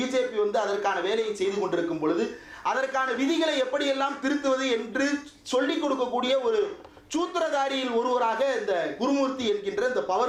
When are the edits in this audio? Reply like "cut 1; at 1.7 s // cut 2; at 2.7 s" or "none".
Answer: none